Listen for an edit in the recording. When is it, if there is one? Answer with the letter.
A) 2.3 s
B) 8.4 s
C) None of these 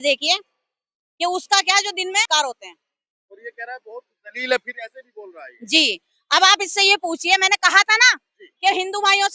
A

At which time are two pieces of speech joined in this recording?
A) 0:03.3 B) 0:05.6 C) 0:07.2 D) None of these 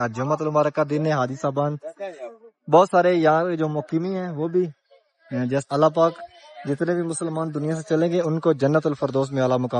B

